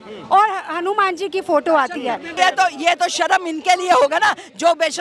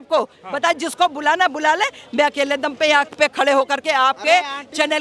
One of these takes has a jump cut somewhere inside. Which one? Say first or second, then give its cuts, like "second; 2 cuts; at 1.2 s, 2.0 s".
first; 1 cut; at 2.3 s